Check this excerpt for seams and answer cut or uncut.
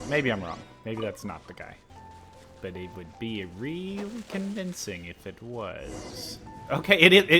cut